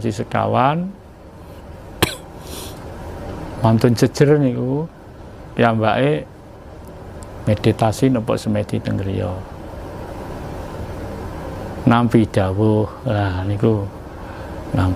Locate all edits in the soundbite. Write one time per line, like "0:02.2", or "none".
none